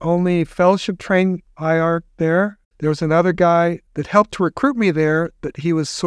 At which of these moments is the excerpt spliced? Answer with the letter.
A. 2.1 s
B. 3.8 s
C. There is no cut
A